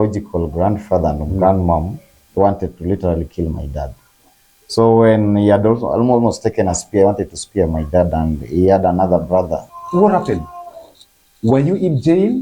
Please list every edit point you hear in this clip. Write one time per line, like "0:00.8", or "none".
0:09.6